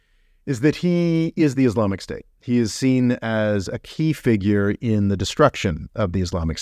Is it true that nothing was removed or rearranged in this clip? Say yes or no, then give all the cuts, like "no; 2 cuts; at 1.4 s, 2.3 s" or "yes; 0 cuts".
yes; 0 cuts